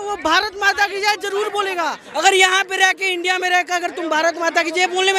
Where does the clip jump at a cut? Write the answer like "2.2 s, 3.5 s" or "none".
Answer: 2.0 s